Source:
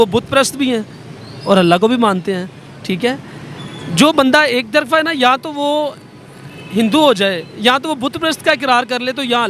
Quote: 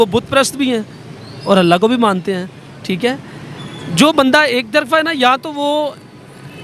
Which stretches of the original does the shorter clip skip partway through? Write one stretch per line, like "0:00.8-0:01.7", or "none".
none